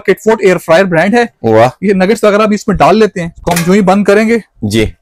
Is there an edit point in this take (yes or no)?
yes